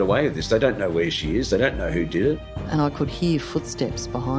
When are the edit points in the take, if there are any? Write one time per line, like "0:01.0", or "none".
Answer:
0:02.5